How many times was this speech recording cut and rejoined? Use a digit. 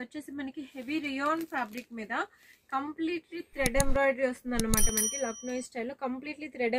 0